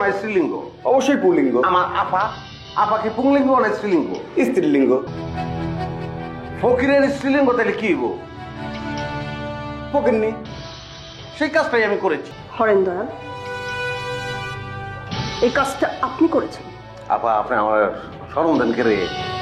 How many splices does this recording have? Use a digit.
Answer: 2